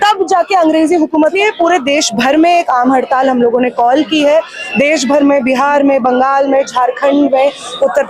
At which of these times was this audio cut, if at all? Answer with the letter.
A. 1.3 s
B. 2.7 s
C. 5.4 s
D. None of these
A